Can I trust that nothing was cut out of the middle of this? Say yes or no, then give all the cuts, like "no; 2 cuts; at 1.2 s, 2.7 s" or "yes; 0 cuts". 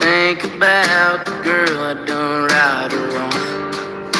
no; 1 cut; at 1.3 s